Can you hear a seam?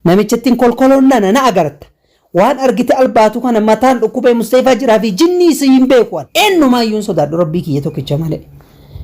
yes; 1 cut; at 6.2 s

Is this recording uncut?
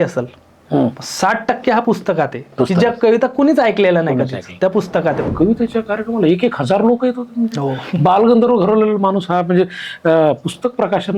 no; 1 cut; at 5.2 s

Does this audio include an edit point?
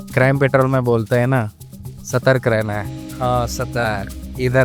no; 0 cuts

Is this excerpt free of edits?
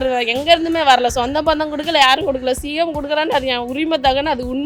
yes; 0 cuts

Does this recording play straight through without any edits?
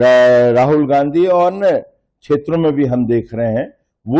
yes; 0 cuts

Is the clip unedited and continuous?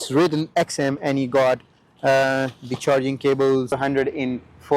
no; 1 cut; at 3.8 s

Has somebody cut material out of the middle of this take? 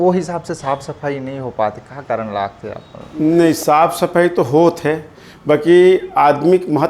no; 0 cuts

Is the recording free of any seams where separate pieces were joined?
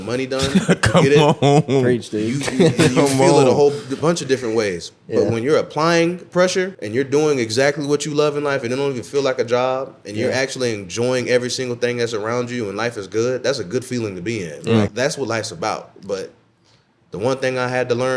no; 2 cuts; at 6.8 s, 14.9 s

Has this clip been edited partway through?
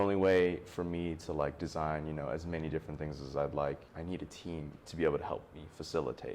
yes; 1 cut; at 3.9 s

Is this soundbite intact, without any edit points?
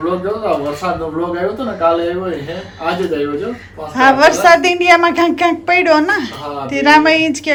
yes; 0 cuts

